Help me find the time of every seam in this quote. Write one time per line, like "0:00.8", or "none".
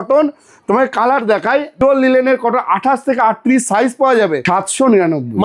0:01.8
0:04.4

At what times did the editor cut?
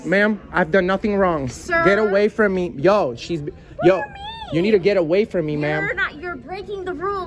none

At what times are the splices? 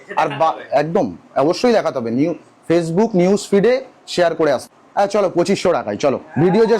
0:04.6

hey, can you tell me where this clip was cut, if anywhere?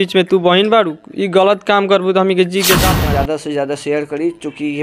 0:02.9

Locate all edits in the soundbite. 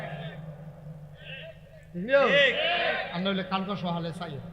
0:01.2

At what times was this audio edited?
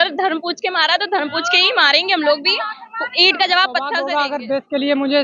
0:04.0

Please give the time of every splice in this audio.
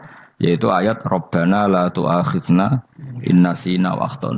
none

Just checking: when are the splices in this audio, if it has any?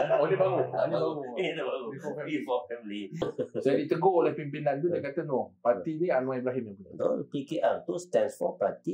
0:03.3

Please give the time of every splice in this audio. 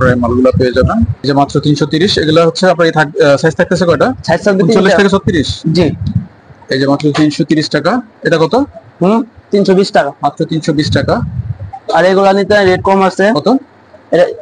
0:01.2

